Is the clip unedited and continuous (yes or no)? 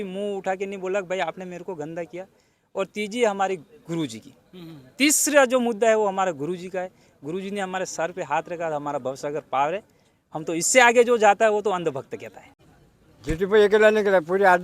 no